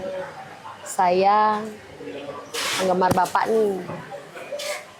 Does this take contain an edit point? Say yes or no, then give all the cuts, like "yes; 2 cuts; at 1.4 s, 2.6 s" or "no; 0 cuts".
no; 0 cuts